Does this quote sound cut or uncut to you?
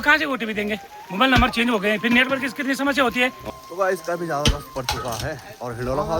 cut